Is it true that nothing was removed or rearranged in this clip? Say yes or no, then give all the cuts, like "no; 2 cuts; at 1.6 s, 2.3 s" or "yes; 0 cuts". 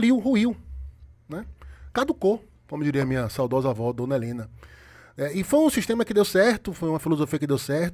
yes; 0 cuts